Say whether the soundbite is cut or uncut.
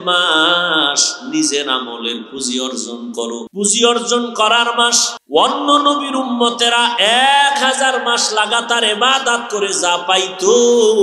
cut